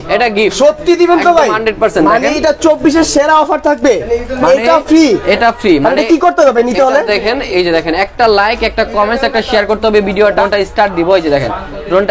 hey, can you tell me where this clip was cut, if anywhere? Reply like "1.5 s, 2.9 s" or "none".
10.4 s